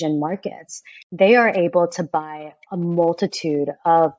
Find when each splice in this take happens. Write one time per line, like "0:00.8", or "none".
0:01.0